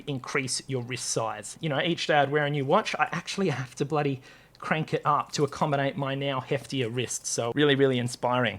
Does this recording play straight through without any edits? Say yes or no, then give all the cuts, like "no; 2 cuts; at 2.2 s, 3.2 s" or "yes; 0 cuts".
no; 2 cuts; at 1.5 s, 7.5 s